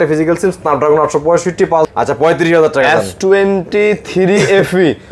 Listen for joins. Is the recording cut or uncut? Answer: cut